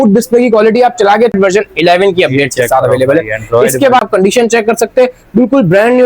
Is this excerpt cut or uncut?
cut